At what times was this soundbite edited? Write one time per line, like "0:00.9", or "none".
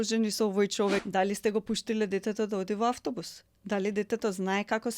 0:01.0